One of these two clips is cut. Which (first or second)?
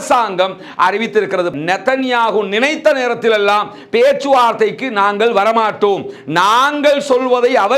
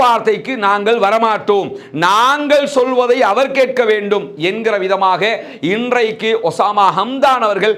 first